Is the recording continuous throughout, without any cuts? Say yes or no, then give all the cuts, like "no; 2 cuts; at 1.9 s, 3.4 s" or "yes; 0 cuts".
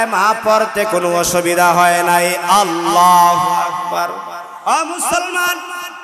no; 1 cut; at 4.6 s